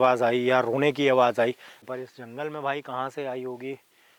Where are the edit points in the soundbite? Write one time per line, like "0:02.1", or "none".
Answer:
0:01.8